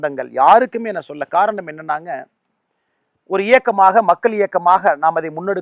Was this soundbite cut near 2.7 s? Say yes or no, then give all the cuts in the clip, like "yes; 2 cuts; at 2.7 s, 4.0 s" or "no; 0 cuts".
no; 1 cut; at 1.2 s